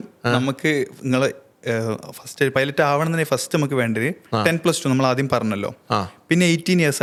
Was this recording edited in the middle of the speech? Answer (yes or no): no